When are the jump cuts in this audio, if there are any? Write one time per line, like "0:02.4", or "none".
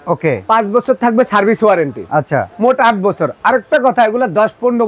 none